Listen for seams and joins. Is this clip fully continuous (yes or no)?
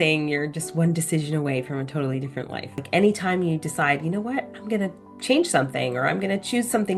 no